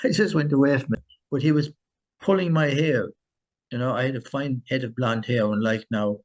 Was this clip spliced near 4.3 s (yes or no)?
no